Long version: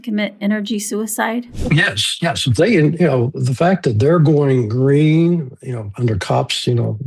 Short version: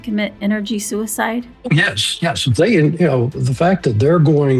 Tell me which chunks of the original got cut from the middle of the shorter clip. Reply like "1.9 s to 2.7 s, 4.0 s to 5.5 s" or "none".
none